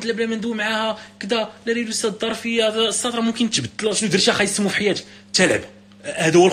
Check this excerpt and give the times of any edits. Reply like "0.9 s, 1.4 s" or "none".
3.7 s